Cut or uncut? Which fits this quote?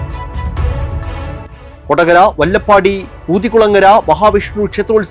cut